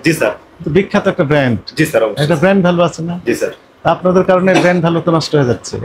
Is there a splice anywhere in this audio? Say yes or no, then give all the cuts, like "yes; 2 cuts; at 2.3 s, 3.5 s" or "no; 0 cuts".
no; 0 cuts